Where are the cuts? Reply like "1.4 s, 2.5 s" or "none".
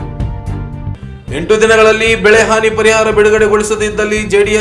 0.9 s